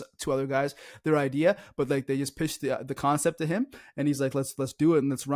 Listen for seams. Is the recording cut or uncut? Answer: uncut